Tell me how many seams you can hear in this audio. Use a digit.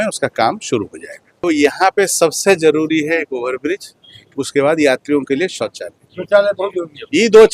1